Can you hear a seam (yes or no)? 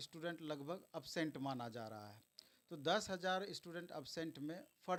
no